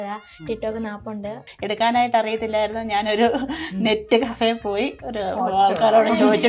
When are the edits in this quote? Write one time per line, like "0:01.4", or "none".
0:01.5